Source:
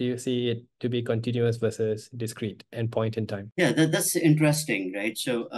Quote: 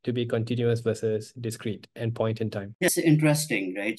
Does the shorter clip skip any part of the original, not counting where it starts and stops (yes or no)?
yes